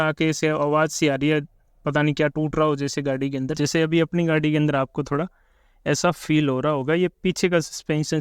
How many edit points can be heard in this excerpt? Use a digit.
1